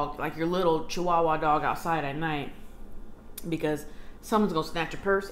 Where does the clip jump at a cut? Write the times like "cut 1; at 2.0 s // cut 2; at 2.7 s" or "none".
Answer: none